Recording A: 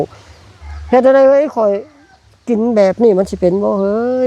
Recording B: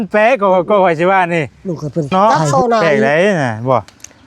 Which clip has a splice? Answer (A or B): B